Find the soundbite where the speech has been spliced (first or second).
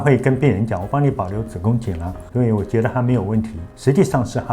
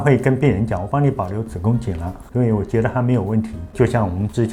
first